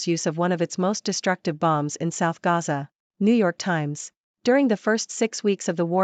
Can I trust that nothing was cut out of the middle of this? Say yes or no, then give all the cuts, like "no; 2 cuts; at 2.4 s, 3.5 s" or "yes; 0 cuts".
yes; 0 cuts